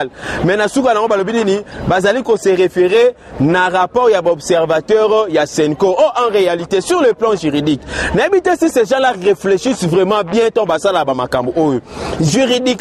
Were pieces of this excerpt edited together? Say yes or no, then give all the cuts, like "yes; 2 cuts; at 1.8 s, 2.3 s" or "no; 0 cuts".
no; 0 cuts